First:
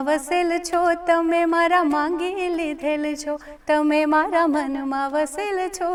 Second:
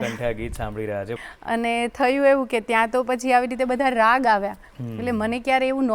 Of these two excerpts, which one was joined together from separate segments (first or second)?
second